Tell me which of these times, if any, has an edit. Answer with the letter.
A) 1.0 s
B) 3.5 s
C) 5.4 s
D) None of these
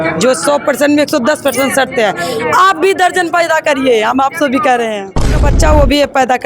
C